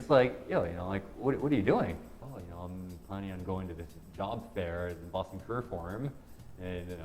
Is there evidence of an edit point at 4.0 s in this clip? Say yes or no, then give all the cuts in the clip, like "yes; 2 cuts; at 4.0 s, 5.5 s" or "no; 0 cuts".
no; 1 cut; at 2.1 s